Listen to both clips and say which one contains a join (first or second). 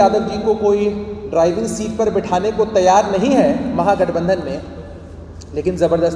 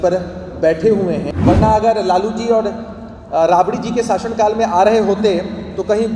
second